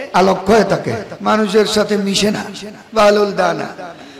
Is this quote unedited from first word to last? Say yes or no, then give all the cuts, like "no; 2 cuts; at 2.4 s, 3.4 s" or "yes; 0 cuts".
no; 1 cut; at 1.1 s